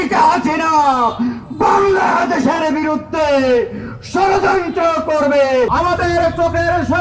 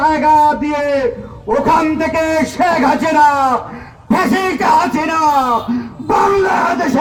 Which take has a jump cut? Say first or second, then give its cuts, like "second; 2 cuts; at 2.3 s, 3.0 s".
first; 1 cut; at 5.7 s